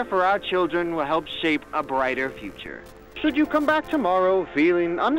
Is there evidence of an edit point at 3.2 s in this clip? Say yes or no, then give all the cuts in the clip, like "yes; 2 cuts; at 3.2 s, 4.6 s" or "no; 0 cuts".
yes; 1 cut; at 3.2 s